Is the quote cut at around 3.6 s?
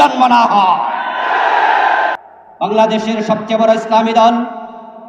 no; 1 cut; at 2.3 s

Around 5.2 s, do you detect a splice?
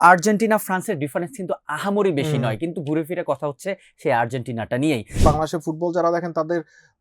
yes; 1 cut; at 5.2 s

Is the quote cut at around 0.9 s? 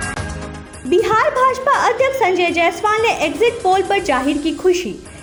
no; 0 cuts

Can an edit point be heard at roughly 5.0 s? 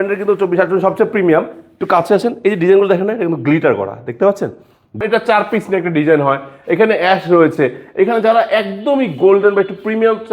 yes; 1 cut; at 5.0 s

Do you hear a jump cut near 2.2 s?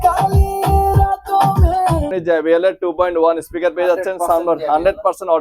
yes; 1 cut; at 2.2 s

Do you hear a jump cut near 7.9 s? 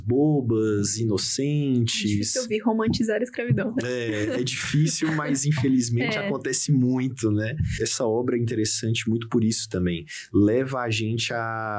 yes; 1 cut; at 7.9 s

